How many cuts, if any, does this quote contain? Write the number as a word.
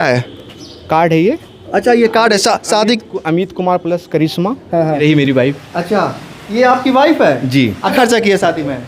two